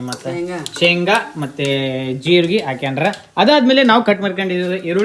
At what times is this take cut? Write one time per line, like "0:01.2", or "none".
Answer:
none